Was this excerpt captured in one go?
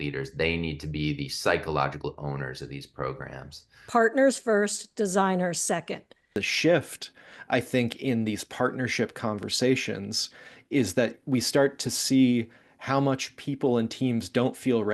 no; 2 cuts; at 3.8 s, 6.4 s

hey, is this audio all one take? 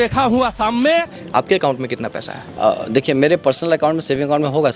no; 1 cut; at 1.2 s

